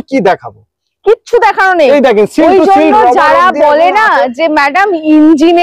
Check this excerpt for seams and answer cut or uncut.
uncut